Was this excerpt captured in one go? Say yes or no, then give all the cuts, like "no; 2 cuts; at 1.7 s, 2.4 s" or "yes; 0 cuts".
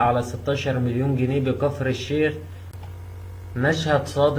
no; 1 cut; at 2.7 s